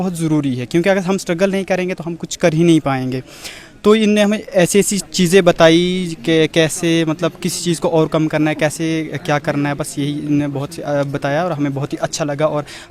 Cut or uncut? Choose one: uncut